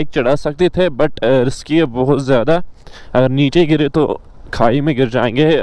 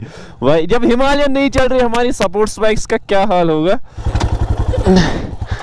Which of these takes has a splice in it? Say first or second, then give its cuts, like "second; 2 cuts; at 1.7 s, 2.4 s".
second; 1 cut; at 3.8 s